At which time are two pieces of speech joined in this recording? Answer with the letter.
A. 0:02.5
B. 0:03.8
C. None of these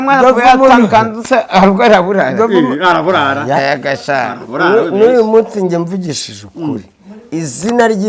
C